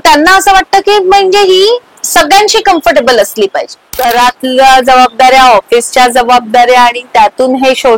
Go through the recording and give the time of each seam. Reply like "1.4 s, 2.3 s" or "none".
3.9 s